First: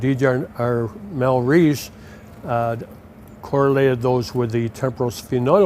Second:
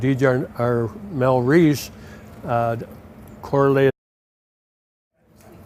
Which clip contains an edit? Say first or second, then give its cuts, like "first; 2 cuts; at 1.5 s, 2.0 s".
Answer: first; 1 cut; at 3.9 s